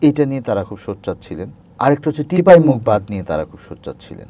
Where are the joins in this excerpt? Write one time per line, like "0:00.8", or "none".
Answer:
0:01.6